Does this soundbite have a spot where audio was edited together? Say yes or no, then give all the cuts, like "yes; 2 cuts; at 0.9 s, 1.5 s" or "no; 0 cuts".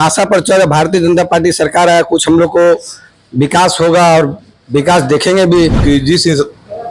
yes; 1 cut; at 5.8 s